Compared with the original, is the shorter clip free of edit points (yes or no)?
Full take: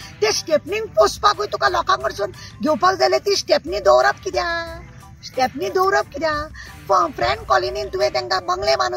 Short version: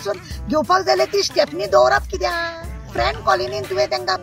no